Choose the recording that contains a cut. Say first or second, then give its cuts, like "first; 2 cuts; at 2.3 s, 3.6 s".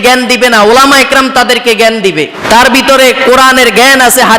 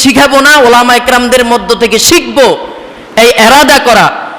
first; 1 cut; at 2.4 s